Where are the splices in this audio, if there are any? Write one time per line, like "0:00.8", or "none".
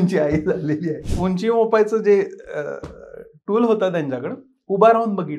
0:01.0